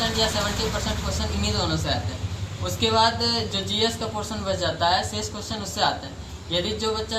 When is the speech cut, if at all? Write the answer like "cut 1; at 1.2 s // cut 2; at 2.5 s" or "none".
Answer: none

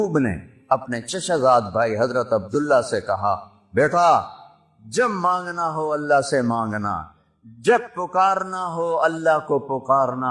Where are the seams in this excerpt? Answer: none

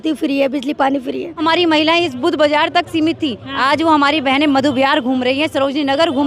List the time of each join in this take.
cut 1; at 1.4 s

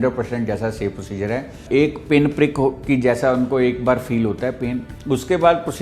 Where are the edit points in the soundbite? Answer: cut 1; at 1.6 s // cut 2; at 4.9 s

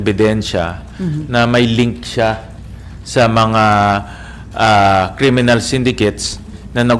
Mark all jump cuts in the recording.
none

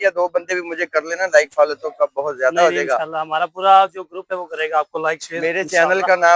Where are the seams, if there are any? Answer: none

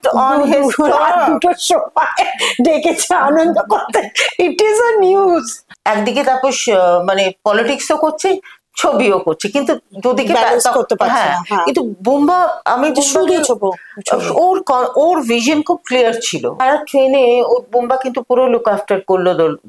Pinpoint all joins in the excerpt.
cut 1; at 5.6 s // cut 2; at 16.6 s

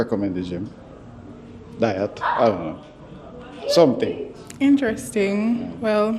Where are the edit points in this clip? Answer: none

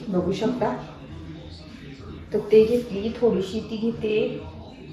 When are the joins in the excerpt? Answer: none

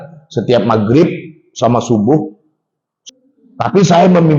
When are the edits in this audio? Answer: cut 1; at 3.1 s

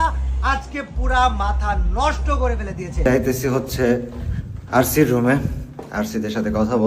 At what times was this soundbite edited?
cut 1; at 3.0 s

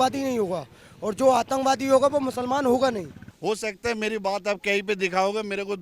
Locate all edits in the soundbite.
cut 1; at 3.2 s

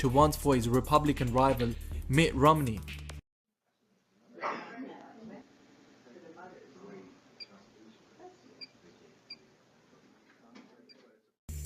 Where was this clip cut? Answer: cut 1; at 2.0 s

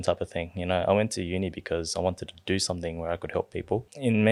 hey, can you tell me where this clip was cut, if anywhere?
none

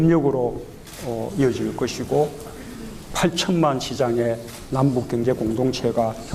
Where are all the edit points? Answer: cut 1; at 2.0 s

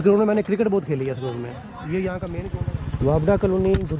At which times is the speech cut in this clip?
cut 1; at 2.5 s

